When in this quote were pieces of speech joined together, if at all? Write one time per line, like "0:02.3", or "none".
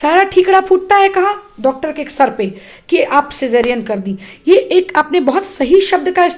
none